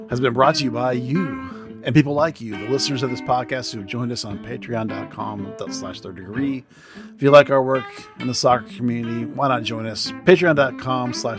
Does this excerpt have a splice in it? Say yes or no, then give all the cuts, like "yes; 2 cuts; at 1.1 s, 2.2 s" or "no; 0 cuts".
no; 0 cuts